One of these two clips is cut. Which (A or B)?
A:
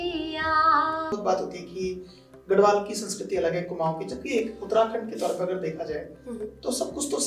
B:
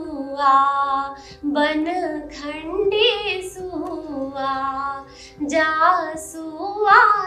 A